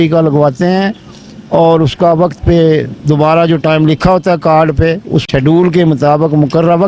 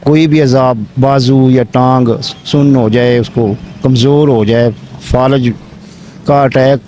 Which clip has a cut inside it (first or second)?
first